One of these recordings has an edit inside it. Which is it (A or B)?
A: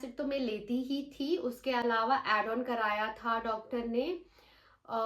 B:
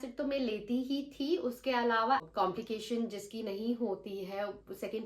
B